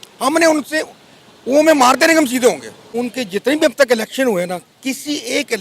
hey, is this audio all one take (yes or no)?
no